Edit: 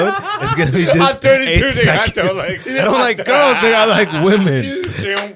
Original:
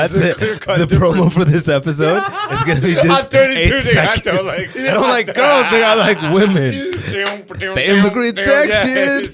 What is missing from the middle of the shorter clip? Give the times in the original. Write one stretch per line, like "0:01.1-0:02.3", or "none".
none